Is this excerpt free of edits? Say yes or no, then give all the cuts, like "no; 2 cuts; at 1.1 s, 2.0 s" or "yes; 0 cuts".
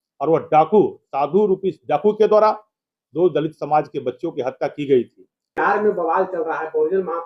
no; 1 cut; at 5.5 s